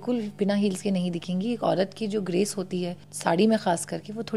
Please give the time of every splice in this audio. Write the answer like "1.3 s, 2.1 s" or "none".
3.0 s